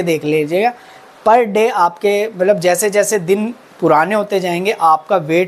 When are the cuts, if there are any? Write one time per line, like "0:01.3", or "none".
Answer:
none